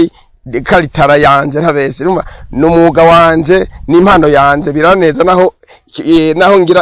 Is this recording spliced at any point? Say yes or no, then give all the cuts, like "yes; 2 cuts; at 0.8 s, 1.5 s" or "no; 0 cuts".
no; 0 cuts